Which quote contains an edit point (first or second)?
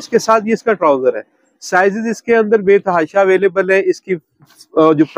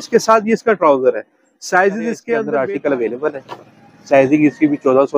second